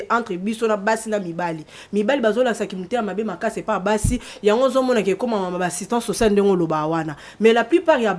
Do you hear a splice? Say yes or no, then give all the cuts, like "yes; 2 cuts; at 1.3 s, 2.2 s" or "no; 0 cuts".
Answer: no; 0 cuts